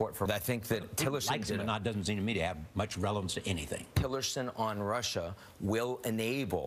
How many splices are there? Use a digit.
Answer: 1